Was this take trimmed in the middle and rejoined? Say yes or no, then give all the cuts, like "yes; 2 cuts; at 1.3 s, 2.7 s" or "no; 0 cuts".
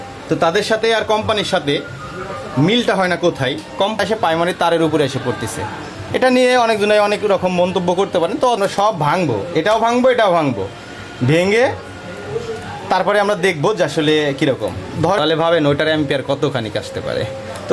yes; 3 cuts; at 4.0 s, 8.6 s, 15.2 s